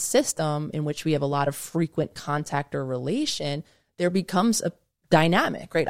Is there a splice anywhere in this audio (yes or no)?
no